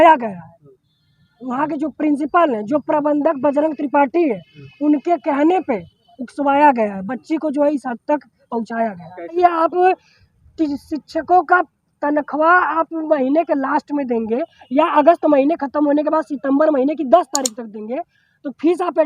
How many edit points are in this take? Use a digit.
1